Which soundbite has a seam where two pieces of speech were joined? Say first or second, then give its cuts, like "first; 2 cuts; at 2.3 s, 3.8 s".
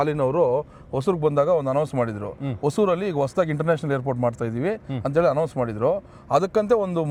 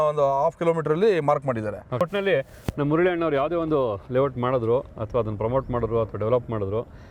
second; 1 cut; at 1.8 s